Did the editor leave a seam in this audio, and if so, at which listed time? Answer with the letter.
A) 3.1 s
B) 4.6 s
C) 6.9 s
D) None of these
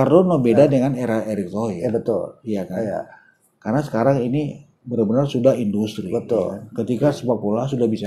D